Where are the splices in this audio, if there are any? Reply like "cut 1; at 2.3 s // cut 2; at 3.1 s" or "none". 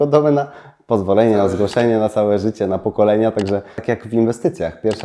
cut 1; at 3.8 s